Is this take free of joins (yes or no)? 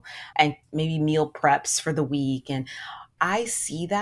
no